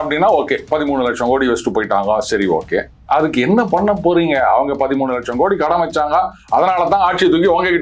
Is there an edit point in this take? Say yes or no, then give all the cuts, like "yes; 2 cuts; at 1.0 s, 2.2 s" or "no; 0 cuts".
no; 0 cuts